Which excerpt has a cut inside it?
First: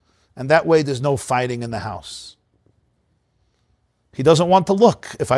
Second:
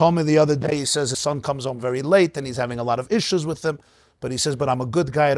second; 1 cut; at 1.2 s

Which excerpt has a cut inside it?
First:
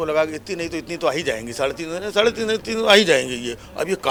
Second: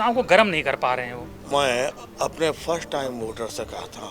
second; 1 cut; at 1.4 s

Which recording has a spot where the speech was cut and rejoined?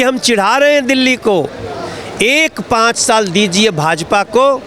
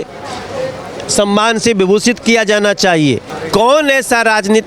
second; 1 cut; at 3.2 s

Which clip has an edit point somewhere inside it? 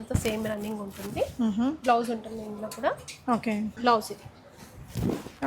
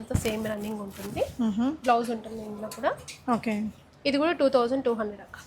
first; 1 cut; at 3.8 s

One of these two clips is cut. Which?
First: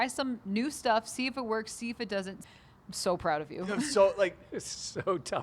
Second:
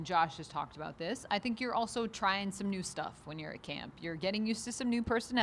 first; 1 cut; at 2.4 s

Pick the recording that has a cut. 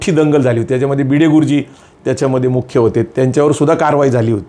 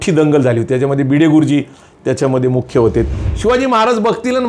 second; 1 cut; at 3.1 s

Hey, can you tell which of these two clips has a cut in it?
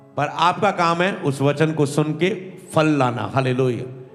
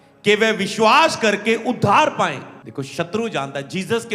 second; 1 cut; at 2.5 s

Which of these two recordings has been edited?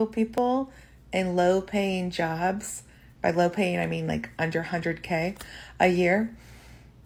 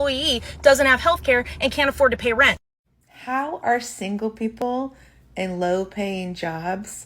second; 1 cut; at 2.6 s

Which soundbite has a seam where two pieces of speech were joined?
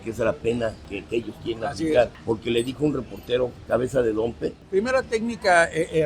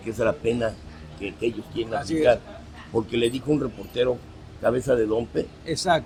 first; 4 cuts; at 0.9 s, 2.2 s, 3.6 s, 4.6 s

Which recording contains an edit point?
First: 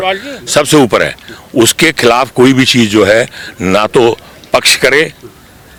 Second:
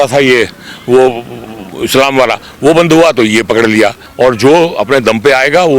second; 1 cut; at 4.0 s

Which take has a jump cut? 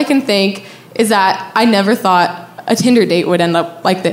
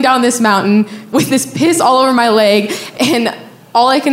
second; 2 cuts; at 1.1 s, 2.8 s

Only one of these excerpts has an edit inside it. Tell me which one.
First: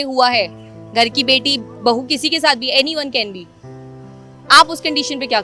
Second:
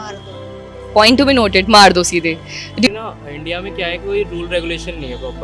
second; 1 cut; at 2.8 s

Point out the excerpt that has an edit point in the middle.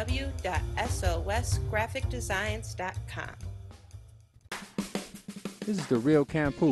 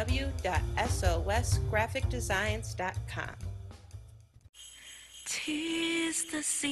first; 1 cut; at 4.4 s

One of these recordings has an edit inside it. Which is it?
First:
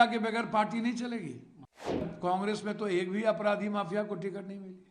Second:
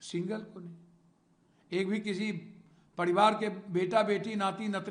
first; 1 cut; at 2.0 s

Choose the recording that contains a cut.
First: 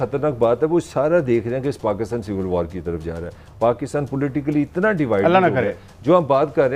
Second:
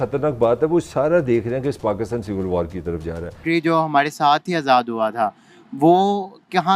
second; 1 cut; at 3.4 s

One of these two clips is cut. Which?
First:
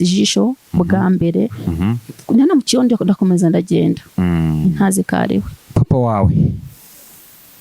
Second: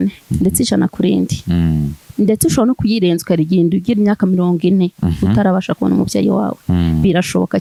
first; 1 cut; at 5.6 s

